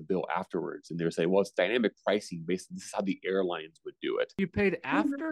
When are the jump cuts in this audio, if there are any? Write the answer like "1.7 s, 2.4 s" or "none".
4.4 s